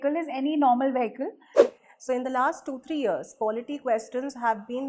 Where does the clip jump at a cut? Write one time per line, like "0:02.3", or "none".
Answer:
0:01.6